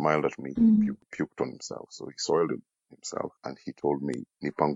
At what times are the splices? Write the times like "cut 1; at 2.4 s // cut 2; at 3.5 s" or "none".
none